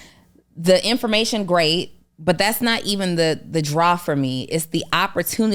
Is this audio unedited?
yes; 0 cuts

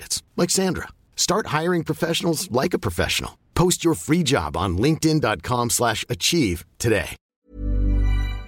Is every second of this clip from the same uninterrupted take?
no; 1 cut; at 7.3 s

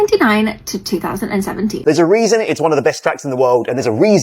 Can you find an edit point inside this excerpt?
yes; 1 cut; at 1.8 s

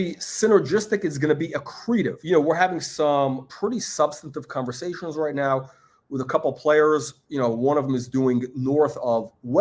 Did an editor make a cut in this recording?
yes; 2 cuts; at 2.2 s, 3.5 s

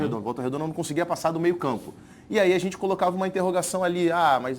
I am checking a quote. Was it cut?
no; 0 cuts

